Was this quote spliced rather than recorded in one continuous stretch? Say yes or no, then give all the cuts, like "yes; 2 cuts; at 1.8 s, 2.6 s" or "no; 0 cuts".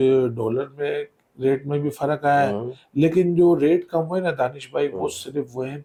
no; 0 cuts